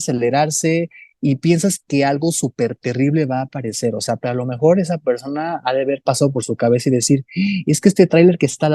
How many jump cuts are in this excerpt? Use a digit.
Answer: 2